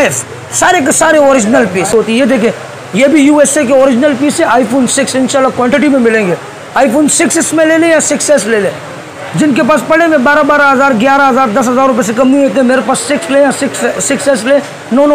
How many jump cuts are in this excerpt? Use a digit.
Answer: 1